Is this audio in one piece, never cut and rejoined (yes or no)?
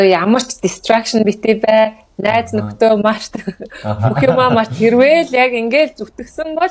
yes